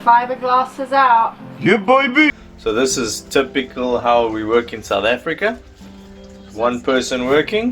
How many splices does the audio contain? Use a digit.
1